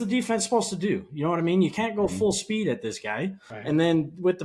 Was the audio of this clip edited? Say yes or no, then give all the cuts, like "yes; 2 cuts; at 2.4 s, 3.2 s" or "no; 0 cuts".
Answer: yes; 1 cut; at 3.5 s